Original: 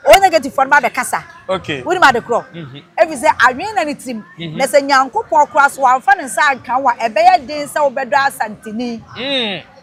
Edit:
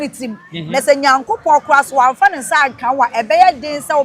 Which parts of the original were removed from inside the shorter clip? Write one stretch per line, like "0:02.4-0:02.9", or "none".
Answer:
none